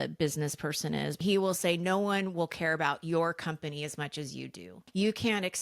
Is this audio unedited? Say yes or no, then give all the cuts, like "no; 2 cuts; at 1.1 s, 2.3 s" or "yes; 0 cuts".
no; 2 cuts; at 1.2 s, 4.8 s